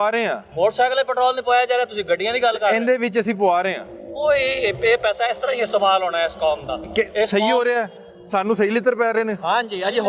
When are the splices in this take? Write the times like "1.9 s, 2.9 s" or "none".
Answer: none